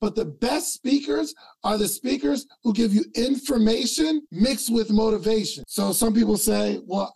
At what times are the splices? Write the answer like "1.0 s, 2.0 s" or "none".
4.3 s, 5.6 s